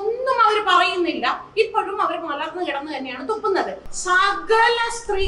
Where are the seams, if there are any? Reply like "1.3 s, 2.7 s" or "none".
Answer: 3.9 s